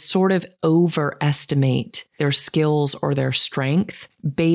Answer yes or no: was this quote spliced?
yes